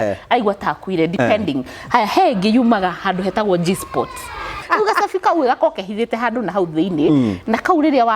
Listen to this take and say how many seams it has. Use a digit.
1